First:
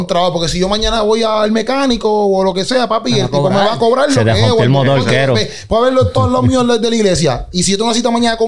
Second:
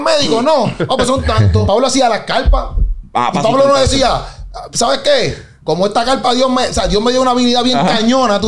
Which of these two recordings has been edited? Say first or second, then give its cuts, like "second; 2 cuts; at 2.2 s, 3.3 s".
second; 1 cut; at 1.6 s